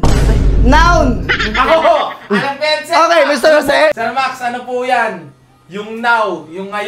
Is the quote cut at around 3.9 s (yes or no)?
yes